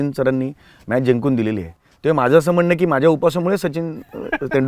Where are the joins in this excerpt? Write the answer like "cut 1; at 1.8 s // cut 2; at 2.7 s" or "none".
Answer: none